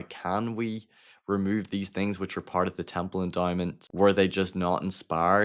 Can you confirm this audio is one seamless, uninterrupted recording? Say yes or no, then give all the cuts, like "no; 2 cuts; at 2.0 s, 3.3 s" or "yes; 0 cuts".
no; 1 cut; at 3.8 s